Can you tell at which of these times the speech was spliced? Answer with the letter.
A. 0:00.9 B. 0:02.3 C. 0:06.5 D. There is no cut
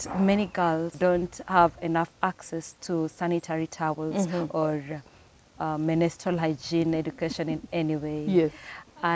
A